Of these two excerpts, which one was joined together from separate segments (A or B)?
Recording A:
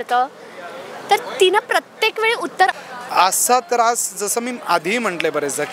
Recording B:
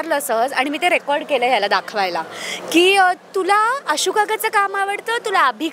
A